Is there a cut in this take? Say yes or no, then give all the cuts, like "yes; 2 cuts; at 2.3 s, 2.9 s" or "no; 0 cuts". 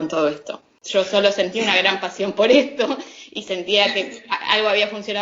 yes; 1 cut; at 0.9 s